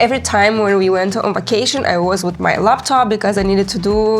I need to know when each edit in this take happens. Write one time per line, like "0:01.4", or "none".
none